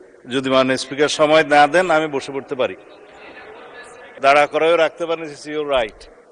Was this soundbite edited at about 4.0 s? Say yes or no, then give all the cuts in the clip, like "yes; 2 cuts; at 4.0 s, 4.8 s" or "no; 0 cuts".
yes; 1 cut; at 4.0 s